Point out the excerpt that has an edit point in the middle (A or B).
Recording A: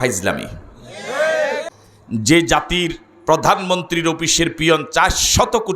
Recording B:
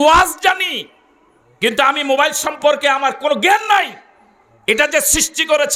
A